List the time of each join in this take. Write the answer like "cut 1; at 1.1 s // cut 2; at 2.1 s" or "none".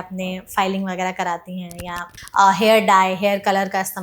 cut 1; at 2.1 s